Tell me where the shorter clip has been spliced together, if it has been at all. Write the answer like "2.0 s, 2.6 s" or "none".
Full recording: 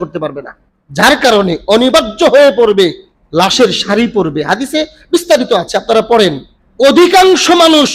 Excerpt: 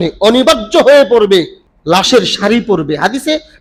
none